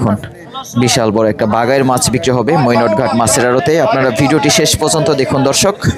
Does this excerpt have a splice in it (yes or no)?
no